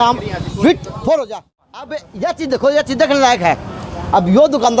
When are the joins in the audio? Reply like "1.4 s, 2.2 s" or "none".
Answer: 1.3 s